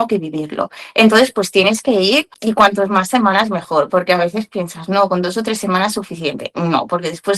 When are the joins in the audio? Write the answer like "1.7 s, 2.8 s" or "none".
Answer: 2.3 s